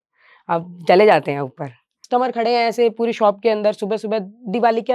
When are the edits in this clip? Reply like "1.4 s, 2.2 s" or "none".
2.0 s